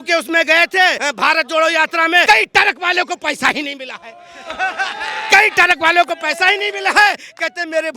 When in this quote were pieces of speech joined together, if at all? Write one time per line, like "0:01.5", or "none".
0:01.0
0:02.2

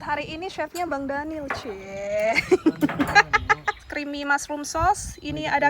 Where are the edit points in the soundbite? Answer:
0:03.9

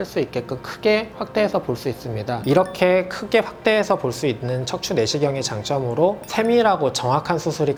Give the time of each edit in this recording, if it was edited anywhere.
none

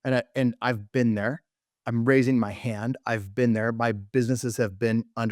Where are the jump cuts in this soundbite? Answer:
none

